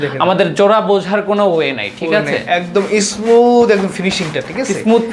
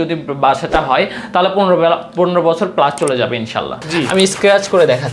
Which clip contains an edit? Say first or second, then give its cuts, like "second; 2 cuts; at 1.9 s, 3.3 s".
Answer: second; 1 cut; at 3.8 s